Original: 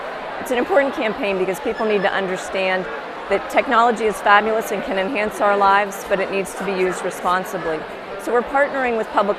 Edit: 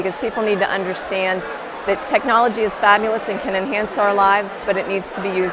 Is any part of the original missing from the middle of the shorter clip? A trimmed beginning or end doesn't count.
no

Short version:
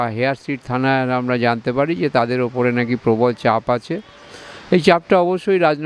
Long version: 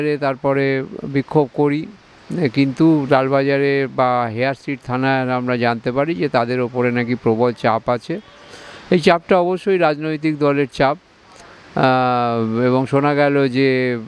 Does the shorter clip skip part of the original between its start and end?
no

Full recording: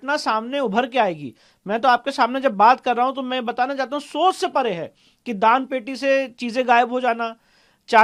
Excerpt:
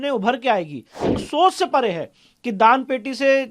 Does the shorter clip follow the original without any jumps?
no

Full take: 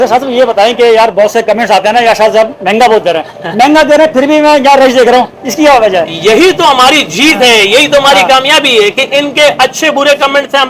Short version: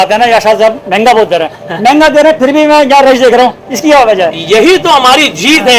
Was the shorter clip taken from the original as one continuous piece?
yes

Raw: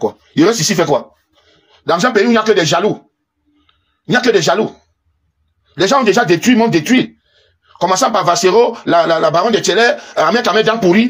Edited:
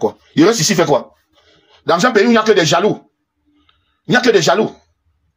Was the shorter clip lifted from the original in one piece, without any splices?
yes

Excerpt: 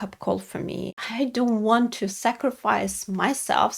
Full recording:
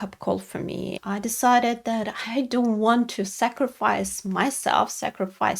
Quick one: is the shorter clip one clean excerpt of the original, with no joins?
no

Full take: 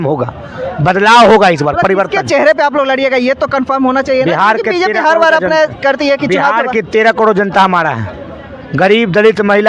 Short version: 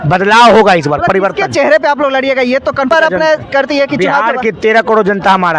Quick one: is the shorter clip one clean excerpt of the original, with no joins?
no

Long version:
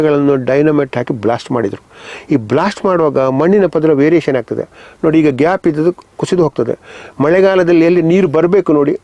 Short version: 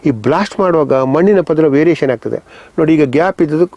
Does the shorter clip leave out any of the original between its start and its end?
no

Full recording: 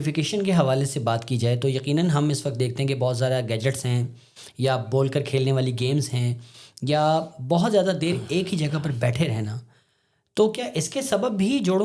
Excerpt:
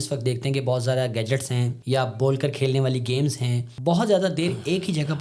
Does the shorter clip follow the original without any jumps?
no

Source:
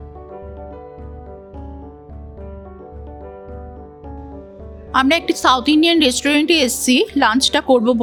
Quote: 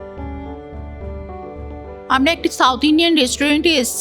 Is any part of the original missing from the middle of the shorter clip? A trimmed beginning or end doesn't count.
yes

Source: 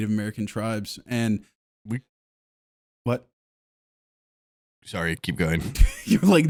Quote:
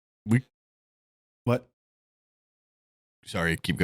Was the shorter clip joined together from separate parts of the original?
no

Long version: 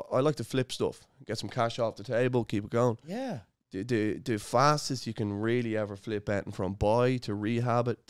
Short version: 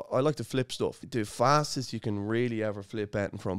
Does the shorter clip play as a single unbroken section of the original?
no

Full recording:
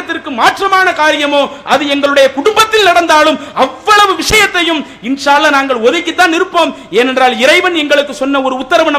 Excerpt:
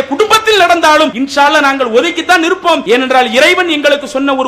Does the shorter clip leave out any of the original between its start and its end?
yes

